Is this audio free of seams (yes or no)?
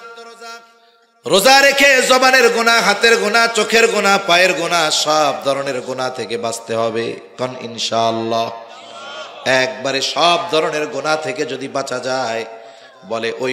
yes